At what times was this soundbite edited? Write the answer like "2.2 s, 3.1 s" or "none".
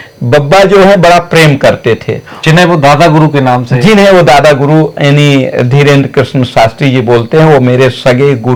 none